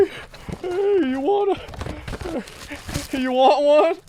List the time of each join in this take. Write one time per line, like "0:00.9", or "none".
none